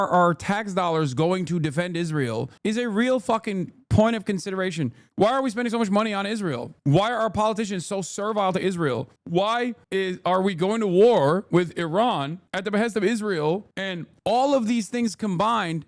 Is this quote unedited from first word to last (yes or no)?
no